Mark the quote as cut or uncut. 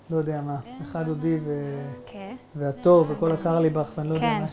uncut